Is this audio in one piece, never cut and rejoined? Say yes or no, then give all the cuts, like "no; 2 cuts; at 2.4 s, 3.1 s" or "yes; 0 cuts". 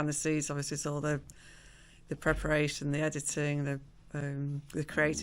yes; 0 cuts